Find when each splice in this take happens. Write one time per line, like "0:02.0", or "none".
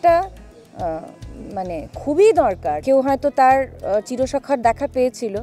0:02.8